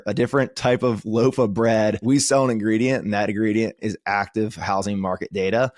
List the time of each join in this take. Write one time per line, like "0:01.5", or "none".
0:02.0
0:03.8